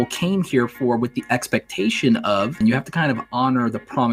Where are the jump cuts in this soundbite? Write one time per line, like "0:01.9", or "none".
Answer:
0:02.6